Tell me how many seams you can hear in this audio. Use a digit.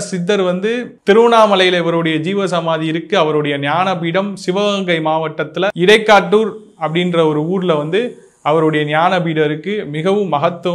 1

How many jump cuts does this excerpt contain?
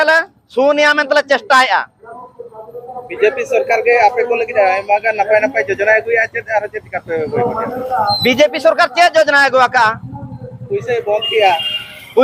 0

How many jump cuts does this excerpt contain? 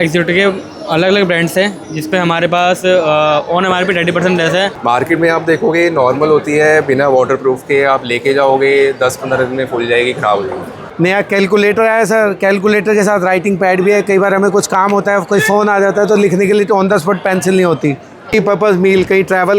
3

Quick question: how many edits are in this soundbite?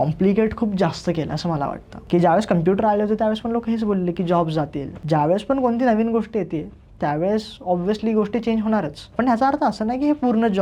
3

